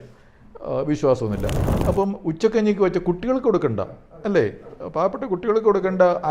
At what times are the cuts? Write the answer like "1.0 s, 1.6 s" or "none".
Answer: 1.5 s

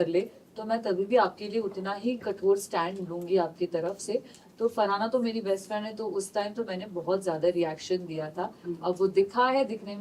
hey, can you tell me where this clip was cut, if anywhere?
none

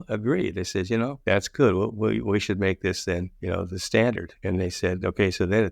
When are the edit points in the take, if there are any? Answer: 1.2 s, 3.3 s, 4.3 s

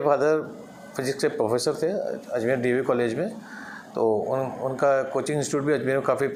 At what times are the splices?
none

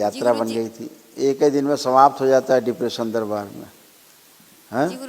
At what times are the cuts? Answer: none

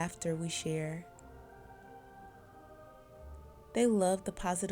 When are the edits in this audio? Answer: 1.4 s, 3.5 s

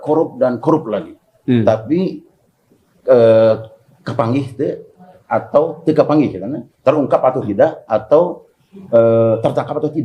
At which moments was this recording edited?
none

